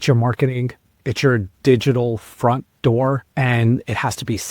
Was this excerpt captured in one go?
no; 1 cut; at 3.3 s

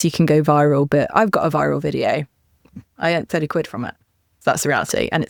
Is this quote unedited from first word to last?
yes; 0 cuts

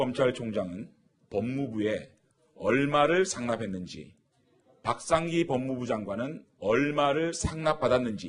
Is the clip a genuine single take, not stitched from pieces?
yes; 0 cuts

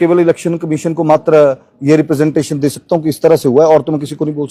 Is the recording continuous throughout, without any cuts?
yes; 0 cuts

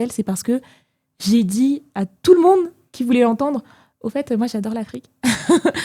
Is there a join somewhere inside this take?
no; 0 cuts

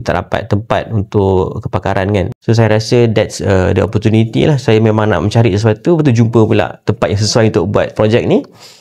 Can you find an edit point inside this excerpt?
yes; 1 cut; at 2.3 s

